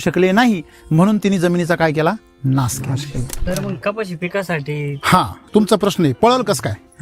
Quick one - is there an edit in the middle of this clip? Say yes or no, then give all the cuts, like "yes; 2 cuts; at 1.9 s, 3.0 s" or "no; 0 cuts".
yes; 1 cut; at 3.4 s